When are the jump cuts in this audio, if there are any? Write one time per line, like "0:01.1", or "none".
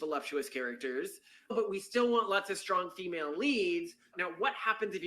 0:01.5
0:04.1

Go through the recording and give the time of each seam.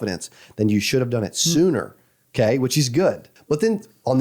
0:03.3

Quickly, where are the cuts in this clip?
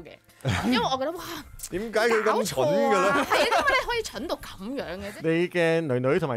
0:05.0

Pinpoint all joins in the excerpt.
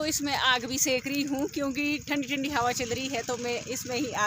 none

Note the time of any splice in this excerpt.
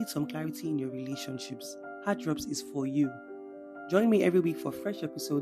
none

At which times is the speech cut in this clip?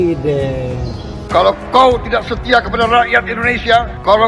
0:01.2

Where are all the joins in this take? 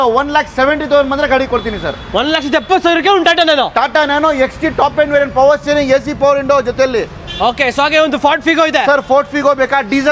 none

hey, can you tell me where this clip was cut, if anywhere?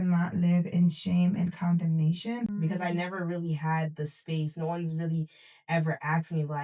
0:02.5

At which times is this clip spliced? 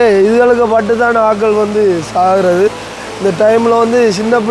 none

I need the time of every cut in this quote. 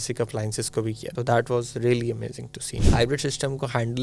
0:01.1
0:02.8

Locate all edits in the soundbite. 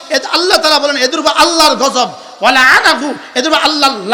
none

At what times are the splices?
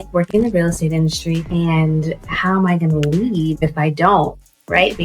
0:01.5

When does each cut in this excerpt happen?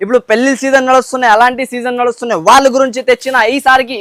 none

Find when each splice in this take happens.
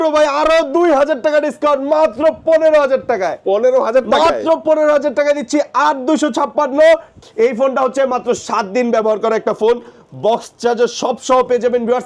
0:07.2

